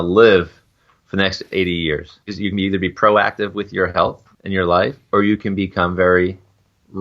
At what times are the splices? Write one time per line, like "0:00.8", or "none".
0:02.3
0:04.3